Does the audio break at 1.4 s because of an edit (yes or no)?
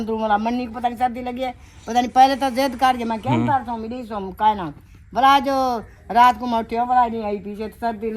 no